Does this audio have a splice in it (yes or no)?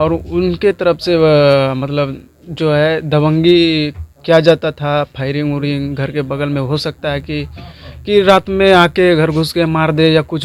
no